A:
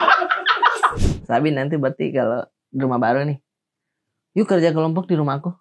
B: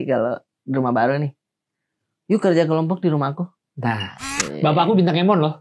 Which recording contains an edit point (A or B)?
A